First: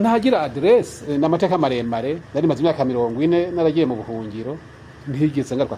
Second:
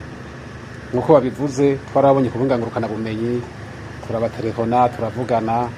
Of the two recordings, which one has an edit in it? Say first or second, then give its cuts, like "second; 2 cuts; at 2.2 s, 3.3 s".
first; 2 cuts; at 1.1 s, 2.2 s